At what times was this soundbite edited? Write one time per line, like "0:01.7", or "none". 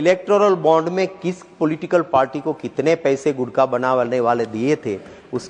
none